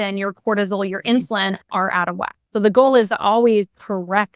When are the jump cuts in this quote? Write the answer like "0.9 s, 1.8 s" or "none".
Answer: 2.4 s